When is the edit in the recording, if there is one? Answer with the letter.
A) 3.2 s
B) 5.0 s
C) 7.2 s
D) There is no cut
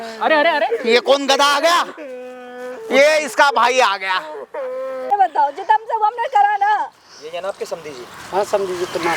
B